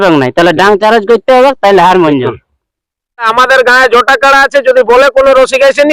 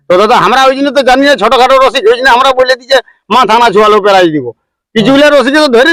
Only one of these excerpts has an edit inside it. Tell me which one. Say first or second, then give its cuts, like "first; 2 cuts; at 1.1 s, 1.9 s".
first; 1 cut; at 3.3 s